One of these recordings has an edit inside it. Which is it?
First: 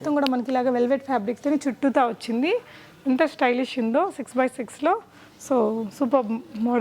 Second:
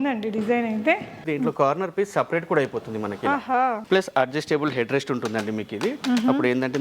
second; 2 cuts; at 1.2 s, 3.8 s

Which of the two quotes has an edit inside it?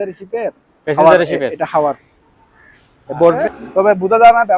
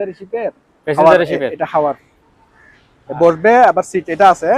first; 1 cut; at 3.4 s

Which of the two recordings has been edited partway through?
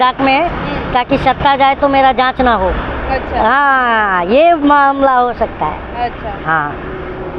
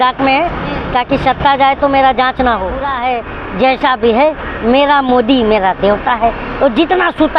second; 1 cut; at 2.9 s

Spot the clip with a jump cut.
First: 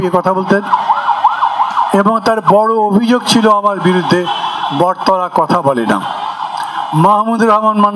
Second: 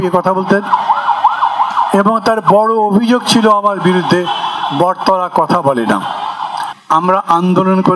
second; 1 cut; at 6.7 s

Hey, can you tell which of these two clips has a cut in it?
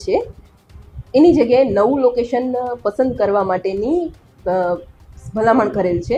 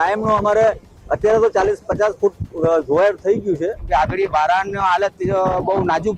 second; 1 cut; at 3.8 s

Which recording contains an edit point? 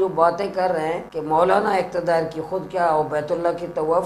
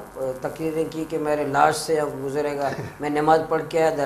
first; 1 cut; at 1.1 s

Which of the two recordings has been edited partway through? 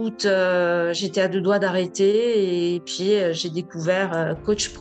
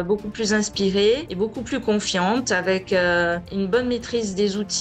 second; 2 cuts; at 1.3 s, 3.5 s

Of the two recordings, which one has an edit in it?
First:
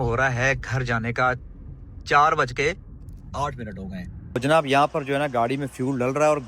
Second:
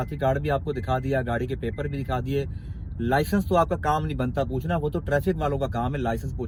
first; 1 cut; at 4.4 s

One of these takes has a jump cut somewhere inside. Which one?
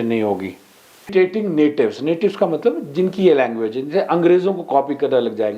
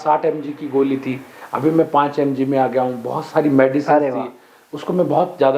first; 1 cut; at 1.1 s

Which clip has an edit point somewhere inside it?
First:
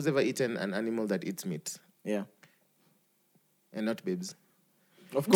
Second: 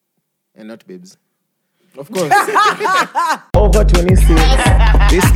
second; 1 cut; at 3.4 s

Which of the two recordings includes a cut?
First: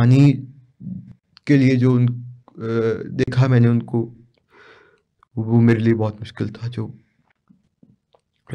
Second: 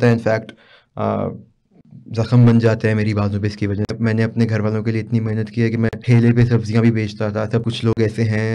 second; 3 cuts; at 3.9 s, 6.0 s, 7.6 s

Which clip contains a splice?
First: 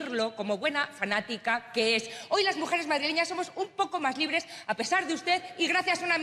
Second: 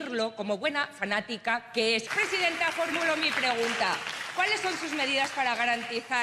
second; 1 cut; at 2.1 s

